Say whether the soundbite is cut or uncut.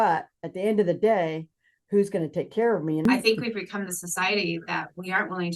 cut